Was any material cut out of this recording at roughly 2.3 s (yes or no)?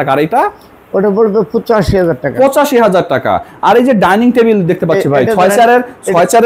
no